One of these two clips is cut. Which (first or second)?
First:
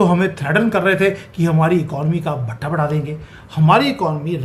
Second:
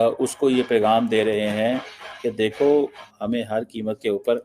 second